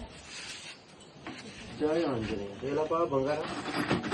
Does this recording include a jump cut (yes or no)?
no